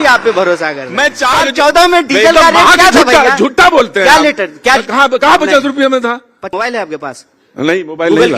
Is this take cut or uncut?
cut